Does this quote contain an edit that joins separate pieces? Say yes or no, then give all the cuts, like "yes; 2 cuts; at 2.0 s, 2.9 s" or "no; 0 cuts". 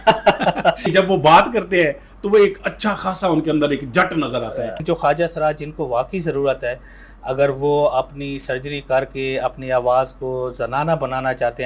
yes; 2 cuts; at 0.8 s, 4.8 s